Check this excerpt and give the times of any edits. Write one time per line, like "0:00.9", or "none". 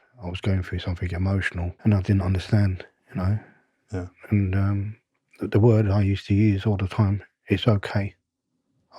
0:01.7
0:02.9